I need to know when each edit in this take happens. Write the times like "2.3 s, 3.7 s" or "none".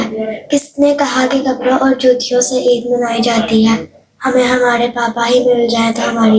none